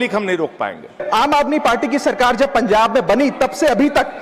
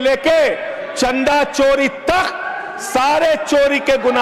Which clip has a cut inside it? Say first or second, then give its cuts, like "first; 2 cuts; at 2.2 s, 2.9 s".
first; 1 cut; at 0.9 s